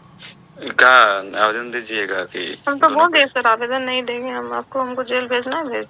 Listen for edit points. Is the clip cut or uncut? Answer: uncut